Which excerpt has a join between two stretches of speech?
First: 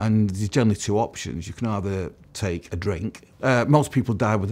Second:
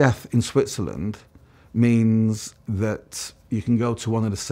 first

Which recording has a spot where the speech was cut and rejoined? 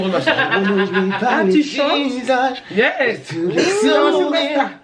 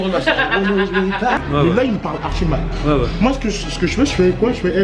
second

